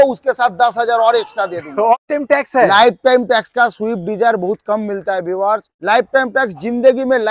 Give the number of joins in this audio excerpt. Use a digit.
2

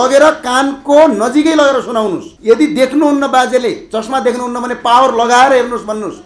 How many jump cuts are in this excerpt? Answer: 1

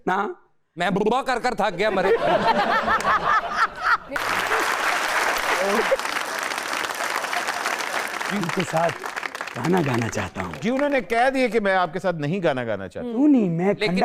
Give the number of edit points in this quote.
1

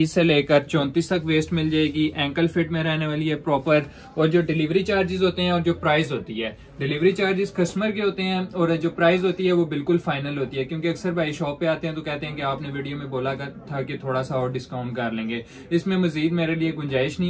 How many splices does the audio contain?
0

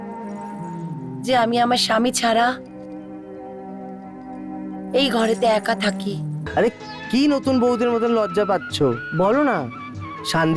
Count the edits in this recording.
1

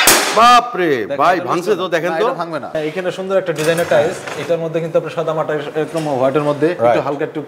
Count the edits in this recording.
1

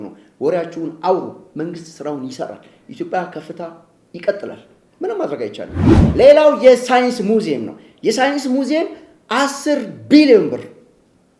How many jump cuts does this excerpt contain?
1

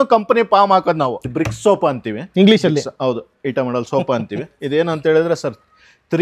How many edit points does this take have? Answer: 1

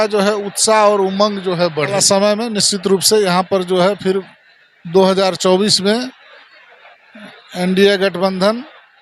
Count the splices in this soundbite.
1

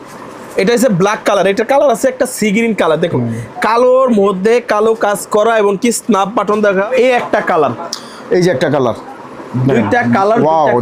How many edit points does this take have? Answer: 1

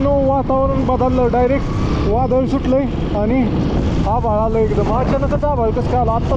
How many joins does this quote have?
0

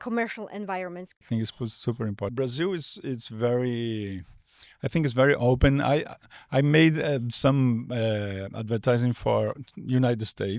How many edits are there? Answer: 2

